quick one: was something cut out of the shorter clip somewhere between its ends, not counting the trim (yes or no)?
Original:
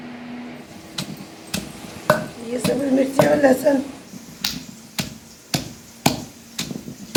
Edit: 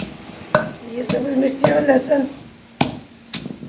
yes